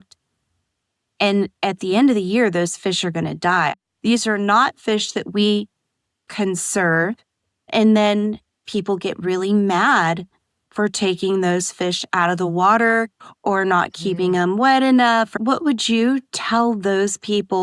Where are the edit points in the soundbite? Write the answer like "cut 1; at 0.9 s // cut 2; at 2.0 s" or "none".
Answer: cut 1; at 3.7 s // cut 2; at 15.3 s